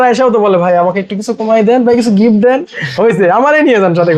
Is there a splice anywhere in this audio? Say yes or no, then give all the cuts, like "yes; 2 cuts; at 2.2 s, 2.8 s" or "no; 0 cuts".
no; 0 cuts